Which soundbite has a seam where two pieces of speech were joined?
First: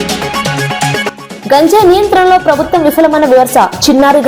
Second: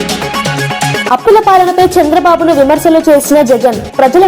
second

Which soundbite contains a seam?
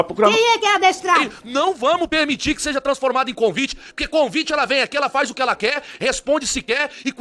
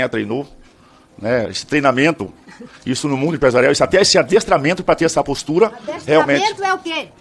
first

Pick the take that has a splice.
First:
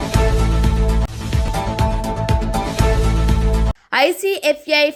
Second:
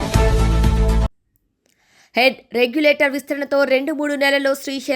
second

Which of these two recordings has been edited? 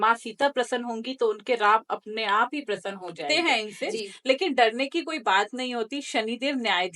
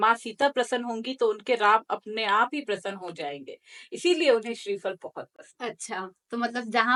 first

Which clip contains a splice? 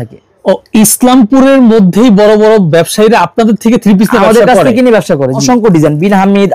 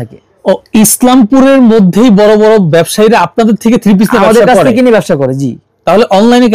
first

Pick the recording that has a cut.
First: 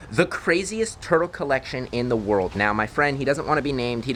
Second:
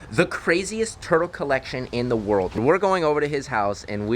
second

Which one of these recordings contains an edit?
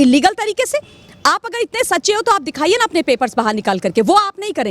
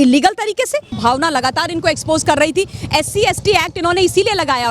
second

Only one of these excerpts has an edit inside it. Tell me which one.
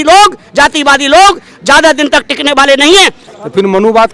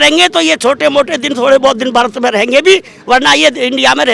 first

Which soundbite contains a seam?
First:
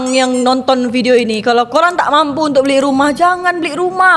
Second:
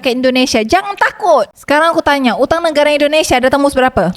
second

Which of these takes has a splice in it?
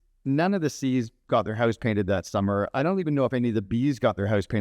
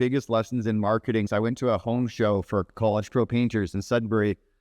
second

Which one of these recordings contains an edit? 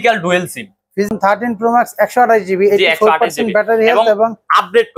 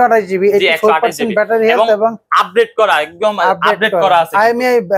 first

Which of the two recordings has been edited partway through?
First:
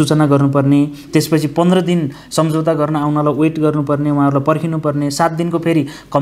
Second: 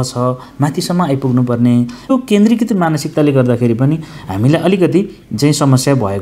second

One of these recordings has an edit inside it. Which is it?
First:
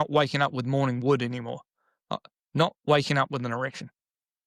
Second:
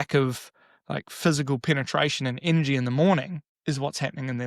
second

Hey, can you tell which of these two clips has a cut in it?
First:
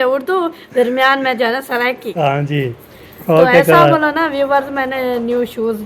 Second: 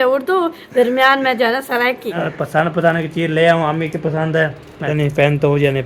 second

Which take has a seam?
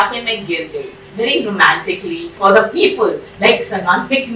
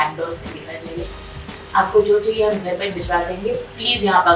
first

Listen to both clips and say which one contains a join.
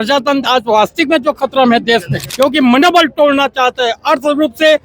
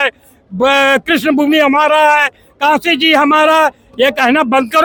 first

